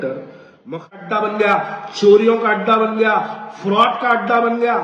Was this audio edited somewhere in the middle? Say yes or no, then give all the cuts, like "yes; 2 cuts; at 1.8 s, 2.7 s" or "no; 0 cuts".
yes; 1 cut; at 0.9 s